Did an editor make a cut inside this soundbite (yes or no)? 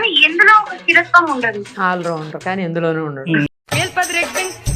yes